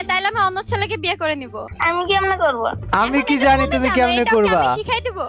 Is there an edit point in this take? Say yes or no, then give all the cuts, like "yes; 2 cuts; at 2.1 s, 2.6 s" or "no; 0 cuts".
yes; 1 cut; at 2.8 s